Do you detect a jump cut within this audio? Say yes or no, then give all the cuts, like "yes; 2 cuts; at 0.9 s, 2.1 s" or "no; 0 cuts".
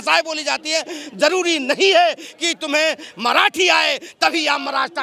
no; 0 cuts